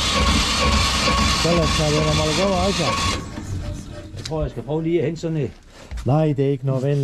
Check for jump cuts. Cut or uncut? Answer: uncut